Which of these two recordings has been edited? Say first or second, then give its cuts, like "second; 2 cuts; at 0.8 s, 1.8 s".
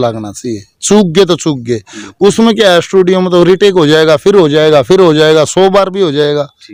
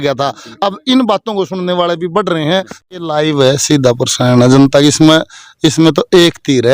second; 1 cut; at 2.7 s